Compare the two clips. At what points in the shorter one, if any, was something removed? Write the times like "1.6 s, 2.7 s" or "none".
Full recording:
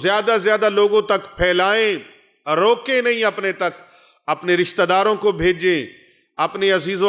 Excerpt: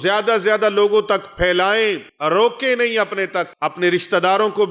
2.1 s, 3.6 s